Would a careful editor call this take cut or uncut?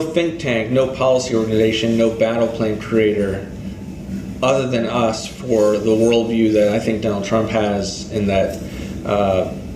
uncut